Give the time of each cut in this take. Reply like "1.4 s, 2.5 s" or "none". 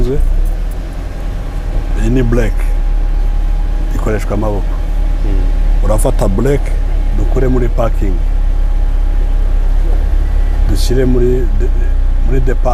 none